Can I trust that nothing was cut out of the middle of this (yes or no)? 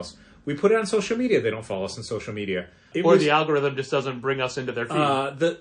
no